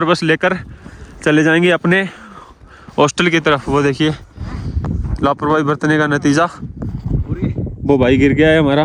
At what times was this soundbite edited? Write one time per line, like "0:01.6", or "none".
none

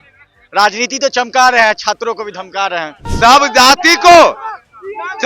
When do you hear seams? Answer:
0:03.0

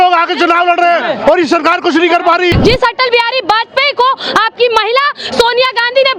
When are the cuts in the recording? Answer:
0:02.5

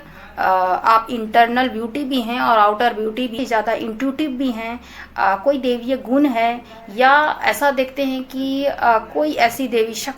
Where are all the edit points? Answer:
0:03.3

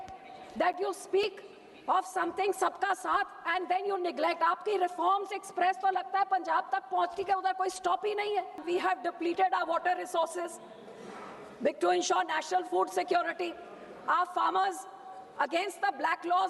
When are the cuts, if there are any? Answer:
0:08.6

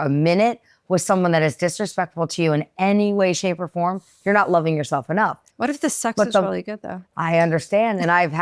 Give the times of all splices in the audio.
0:05.5

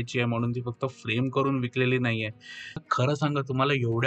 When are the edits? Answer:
0:02.8

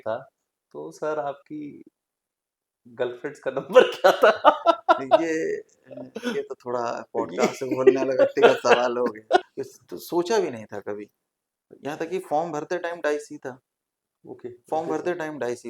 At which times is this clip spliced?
0:09.6

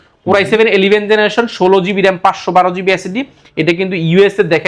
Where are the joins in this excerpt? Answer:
none

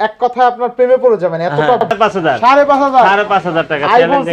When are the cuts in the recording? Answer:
0:01.9

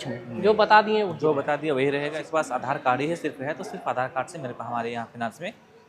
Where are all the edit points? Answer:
0:02.2

